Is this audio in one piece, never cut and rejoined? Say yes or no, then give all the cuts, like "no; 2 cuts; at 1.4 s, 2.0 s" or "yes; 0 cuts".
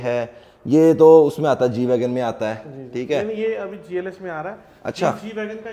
yes; 0 cuts